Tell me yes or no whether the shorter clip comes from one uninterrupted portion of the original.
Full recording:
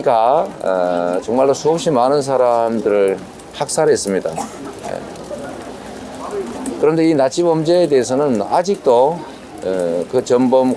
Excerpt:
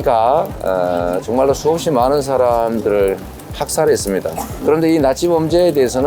no